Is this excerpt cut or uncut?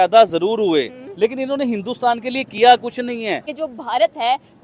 cut